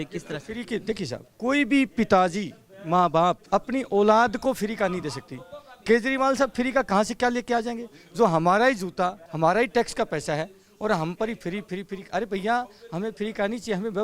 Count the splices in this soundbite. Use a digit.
3